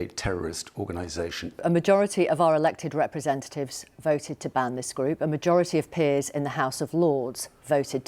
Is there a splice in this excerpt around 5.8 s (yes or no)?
no